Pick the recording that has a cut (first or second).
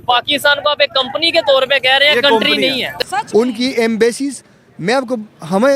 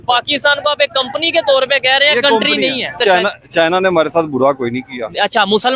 first